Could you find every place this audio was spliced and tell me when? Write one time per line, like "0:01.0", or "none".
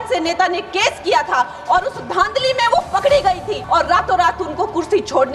0:03.6